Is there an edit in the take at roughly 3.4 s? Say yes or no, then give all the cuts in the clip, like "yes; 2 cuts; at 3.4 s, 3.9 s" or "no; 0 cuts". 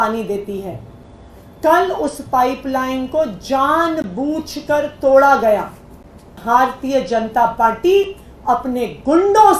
no; 1 cut; at 6.4 s